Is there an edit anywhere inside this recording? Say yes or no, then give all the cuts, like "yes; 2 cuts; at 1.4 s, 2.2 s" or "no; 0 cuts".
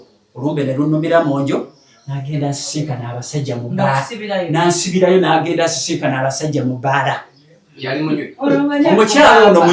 no; 0 cuts